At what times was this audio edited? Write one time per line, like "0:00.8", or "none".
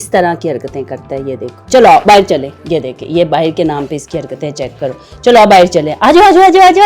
0:01.5